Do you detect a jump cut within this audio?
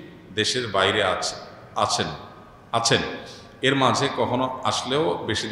no; 0 cuts

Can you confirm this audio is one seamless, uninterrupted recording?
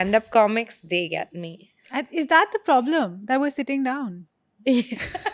yes; 0 cuts

